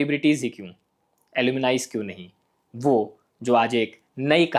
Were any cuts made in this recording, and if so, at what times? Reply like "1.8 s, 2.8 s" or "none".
none

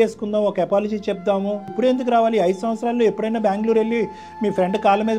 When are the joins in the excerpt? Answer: 1.7 s

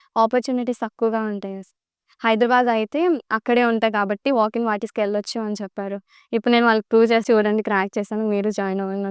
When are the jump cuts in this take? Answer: 7.2 s

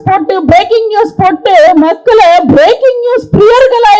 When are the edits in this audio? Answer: none

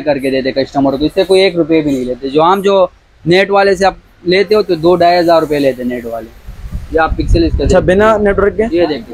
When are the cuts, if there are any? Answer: none

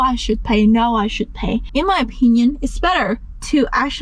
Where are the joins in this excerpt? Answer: 1.6 s

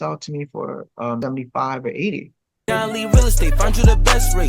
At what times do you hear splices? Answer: 1.2 s, 2.6 s

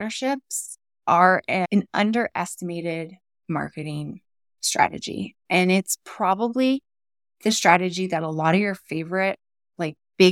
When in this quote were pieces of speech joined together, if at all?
none

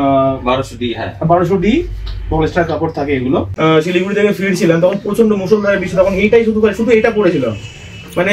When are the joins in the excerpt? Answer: 3.5 s

